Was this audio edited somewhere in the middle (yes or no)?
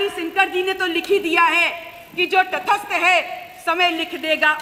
no